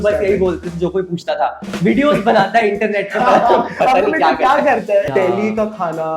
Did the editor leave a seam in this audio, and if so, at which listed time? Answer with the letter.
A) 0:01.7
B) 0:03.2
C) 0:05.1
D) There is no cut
C